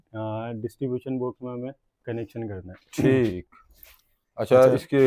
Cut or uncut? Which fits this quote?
uncut